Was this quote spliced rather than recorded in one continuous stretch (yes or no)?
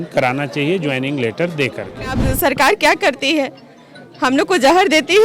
yes